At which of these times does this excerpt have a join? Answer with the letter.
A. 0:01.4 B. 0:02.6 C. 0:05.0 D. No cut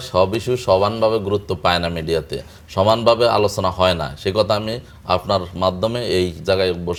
D